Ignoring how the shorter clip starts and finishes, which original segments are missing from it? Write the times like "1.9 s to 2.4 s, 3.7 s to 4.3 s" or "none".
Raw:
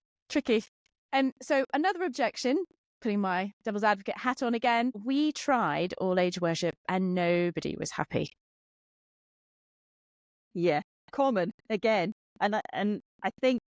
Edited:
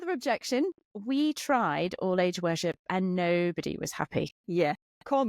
2.9 s to 5.0 s, 8.4 s to 10.4 s